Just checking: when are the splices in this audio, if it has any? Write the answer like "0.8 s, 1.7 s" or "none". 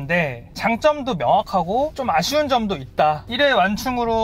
2.0 s, 3.3 s